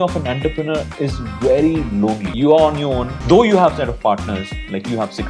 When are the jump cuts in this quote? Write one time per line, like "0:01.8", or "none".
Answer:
0:02.3
0:03.1